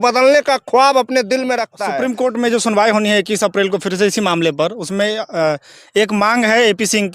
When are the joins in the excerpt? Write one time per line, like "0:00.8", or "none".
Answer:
0:01.8